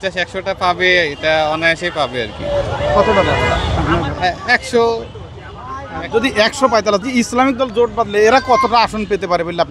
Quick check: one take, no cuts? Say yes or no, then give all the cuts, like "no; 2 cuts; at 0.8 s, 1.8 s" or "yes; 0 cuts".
no; 1 cut; at 7.0 s